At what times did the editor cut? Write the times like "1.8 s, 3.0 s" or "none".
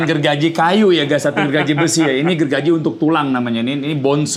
none